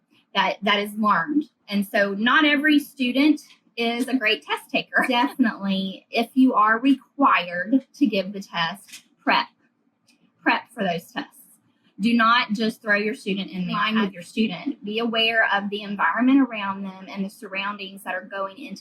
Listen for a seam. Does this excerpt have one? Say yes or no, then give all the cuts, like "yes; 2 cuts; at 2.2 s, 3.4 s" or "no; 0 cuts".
yes; 2 cuts; at 5.1 s, 13.8 s